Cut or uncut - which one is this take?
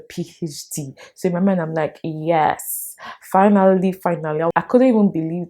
cut